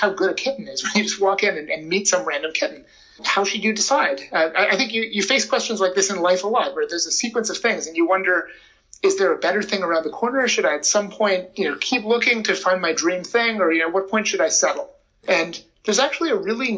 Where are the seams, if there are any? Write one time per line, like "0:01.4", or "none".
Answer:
0:15.1